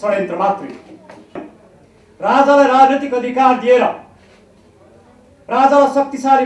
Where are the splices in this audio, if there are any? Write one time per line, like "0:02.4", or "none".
0:01.5